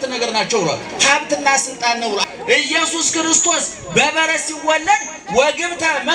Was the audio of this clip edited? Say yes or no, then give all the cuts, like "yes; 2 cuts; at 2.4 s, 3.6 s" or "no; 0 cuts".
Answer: yes; 1 cut; at 2.2 s